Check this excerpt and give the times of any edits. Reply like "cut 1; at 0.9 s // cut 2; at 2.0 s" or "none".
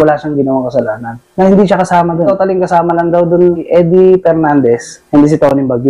cut 1; at 1.2 s // cut 2; at 2.3 s // cut 3; at 3.6 s // cut 4; at 4.9 s